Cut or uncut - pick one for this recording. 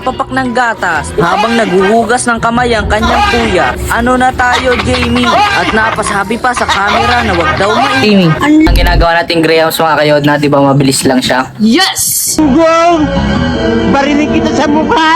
cut